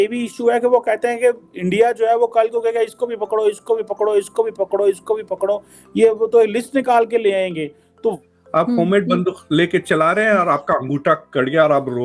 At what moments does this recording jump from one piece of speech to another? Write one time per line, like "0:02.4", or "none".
0:08.2